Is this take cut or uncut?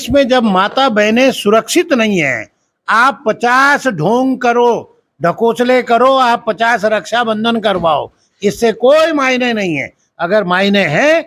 uncut